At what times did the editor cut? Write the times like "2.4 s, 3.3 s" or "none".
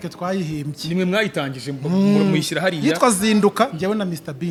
none